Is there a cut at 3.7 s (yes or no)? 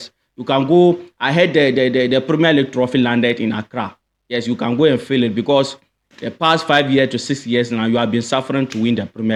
no